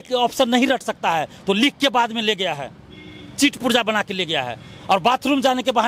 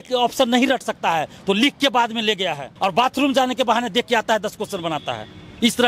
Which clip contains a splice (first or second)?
second